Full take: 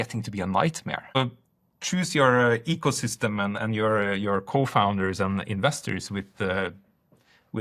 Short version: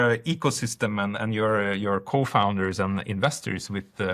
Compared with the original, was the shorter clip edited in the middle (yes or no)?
no